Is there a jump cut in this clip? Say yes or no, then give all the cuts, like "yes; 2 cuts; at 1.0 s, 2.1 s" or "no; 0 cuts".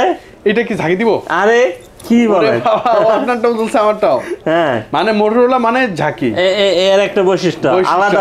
no; 0 cuts